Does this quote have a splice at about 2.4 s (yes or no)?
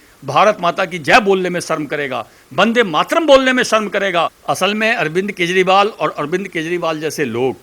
no